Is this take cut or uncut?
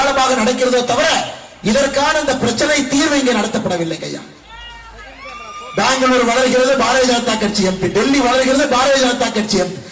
uncut